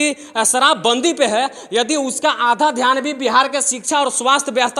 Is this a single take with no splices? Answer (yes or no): yes